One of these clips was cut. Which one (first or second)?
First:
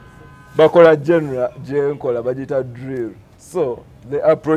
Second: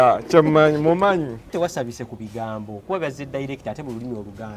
second